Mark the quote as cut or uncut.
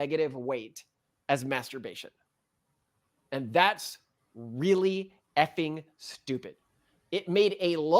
uncut